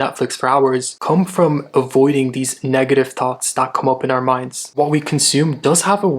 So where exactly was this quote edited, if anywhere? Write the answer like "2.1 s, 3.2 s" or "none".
4.7 s